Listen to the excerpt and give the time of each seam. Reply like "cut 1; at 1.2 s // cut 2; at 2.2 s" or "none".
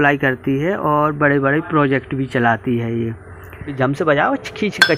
cut 1; at 3.7 s